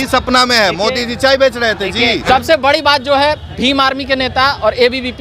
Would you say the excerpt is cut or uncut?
cut